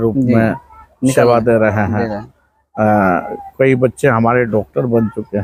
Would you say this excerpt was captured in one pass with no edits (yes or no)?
yes